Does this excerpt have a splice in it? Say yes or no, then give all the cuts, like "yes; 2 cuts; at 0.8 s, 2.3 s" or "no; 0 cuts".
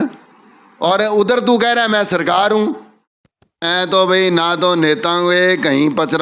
yes; 1 cut; at 2.9 s